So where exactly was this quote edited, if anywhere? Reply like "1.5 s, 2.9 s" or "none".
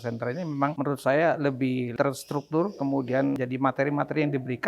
0.7 s, 1.9 s, 3.4 s

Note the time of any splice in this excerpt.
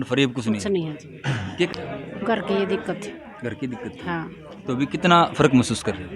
1.7 s

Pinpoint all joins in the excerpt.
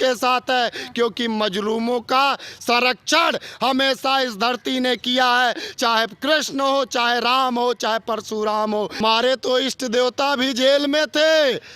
none

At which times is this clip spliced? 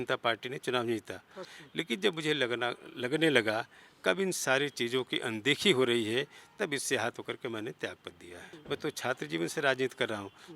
1.4 s, 8.5 s

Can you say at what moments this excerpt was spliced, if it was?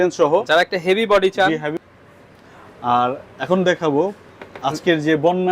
1.7 s

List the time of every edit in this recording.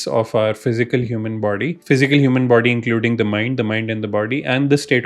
1.8 s

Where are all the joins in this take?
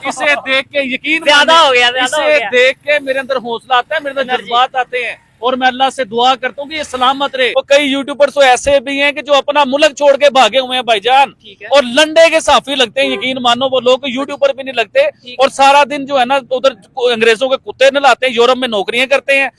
7.5 s

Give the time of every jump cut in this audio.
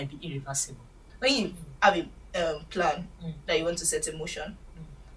1.0 s

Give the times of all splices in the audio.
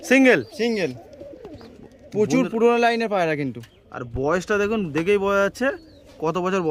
none

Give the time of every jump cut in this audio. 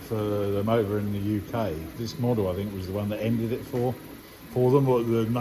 1.9 s

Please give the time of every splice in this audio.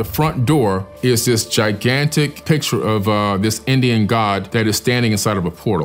none

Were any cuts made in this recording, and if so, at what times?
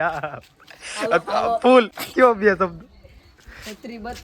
2.0 s

